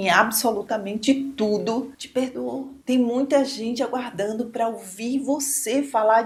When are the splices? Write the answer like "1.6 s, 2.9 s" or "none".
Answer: none